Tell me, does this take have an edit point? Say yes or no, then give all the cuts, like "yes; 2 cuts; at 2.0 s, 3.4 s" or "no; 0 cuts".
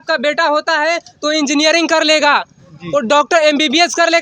no; 0 cuts